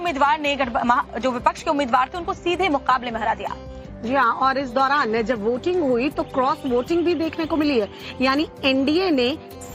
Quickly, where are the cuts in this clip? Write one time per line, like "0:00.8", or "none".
0:05.6